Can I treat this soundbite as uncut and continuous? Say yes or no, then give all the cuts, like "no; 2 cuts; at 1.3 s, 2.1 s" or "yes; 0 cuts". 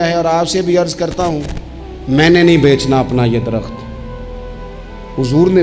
yes; 0 cuts